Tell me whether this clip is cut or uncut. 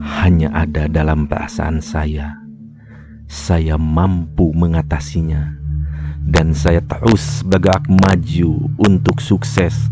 uncut